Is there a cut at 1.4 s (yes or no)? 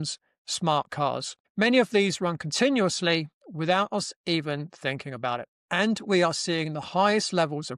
yes